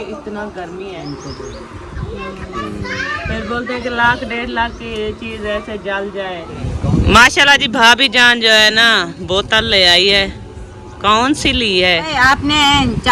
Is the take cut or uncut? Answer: cut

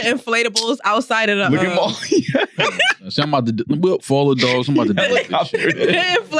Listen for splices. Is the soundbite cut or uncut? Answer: uncut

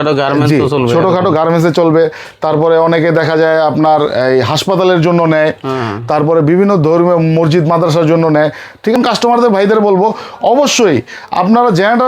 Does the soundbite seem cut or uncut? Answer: cut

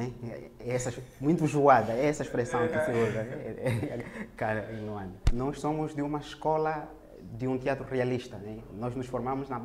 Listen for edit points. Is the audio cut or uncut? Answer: cut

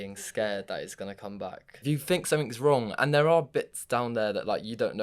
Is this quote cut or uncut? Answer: cut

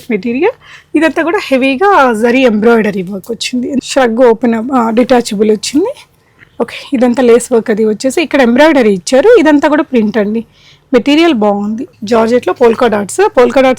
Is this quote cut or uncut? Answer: cut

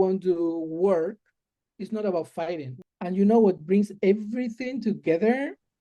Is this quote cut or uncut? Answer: cut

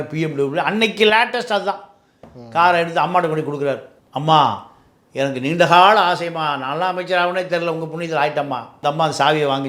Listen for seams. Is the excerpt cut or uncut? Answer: cut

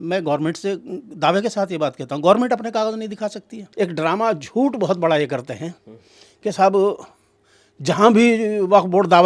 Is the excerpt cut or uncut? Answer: cut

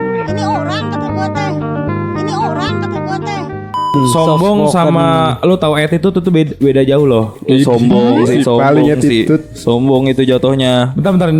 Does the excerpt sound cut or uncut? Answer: cut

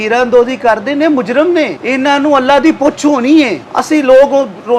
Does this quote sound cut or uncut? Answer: cut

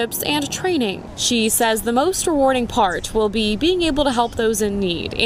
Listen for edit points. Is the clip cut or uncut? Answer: uncut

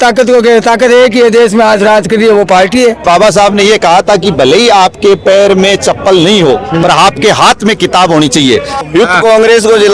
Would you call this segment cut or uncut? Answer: cut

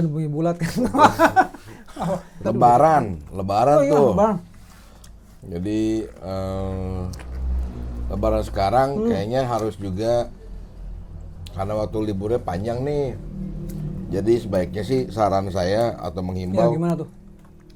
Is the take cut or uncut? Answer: uncut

